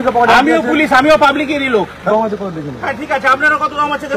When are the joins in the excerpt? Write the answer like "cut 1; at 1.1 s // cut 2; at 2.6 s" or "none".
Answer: cut 1; at 2.1 s